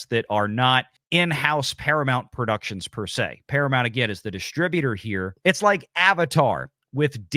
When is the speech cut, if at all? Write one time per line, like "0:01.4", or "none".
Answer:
0:01.0
0:05.3